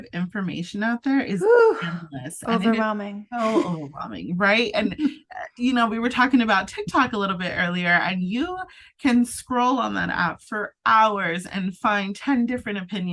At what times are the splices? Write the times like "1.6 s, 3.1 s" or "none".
none

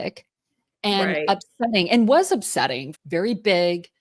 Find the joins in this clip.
2.9 s

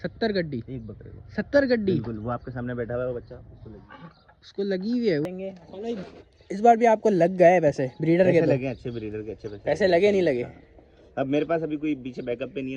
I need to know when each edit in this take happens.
5.2 s

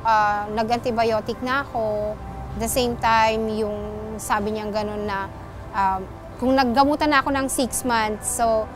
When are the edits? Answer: none

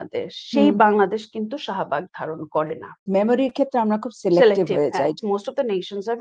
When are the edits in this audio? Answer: 3.1 s, 5.2 s

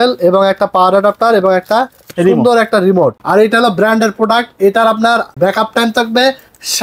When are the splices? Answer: 3.2 s, 5.3 s

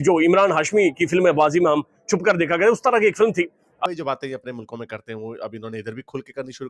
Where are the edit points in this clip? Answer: 3.7 s

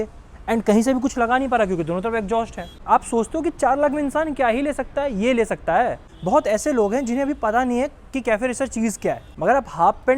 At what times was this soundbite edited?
2.8 s, 6.1 s, 9.3 s

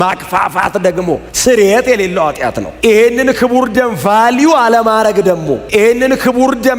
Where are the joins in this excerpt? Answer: 2.7 s

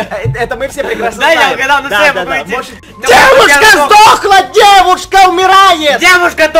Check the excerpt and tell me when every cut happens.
2.8 s

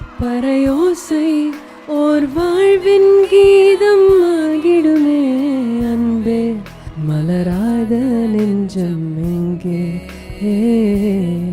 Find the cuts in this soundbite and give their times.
1.7 s, 6.8 s

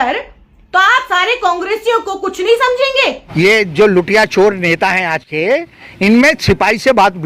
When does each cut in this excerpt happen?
3.2 s

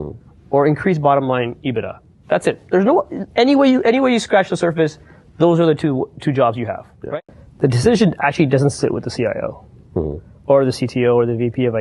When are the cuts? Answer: 7.1 s

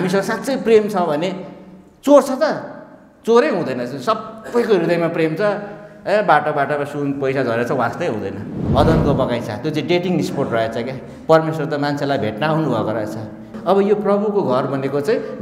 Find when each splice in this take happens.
8.6 s, 13.5 s

